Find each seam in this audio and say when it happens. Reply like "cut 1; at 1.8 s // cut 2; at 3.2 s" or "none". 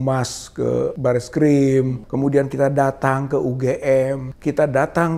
cut 1; at 1.0 s // cut 2; at 2.0 s // cut 3; at 4.3 s